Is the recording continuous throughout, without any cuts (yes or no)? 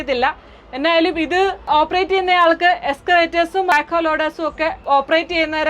no